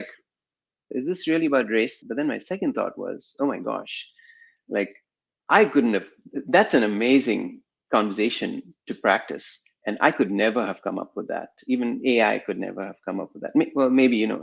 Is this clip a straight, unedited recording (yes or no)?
yes